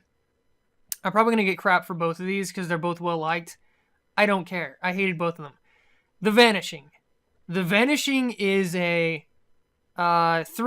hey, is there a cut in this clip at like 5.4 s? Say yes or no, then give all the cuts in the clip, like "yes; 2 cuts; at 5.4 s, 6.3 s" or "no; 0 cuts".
yes; 1 cut; at 5.4 s